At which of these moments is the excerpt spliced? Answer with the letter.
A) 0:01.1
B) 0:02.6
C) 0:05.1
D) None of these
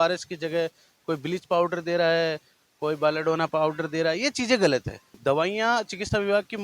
C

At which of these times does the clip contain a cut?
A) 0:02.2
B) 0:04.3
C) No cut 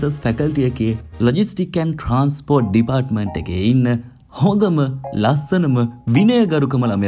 C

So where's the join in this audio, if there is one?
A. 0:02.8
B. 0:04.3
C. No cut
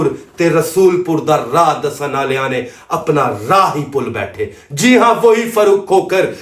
C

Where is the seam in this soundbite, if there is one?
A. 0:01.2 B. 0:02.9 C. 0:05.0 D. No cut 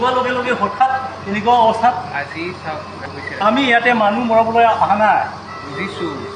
B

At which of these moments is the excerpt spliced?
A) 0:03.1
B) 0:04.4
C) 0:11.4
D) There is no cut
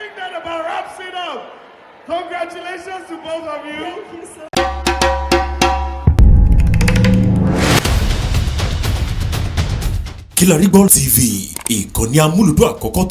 B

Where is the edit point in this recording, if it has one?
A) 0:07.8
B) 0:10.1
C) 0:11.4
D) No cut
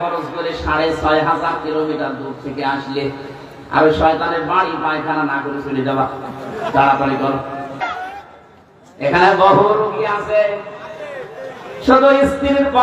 A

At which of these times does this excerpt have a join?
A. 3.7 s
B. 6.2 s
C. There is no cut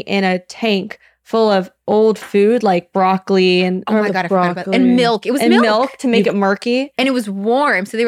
C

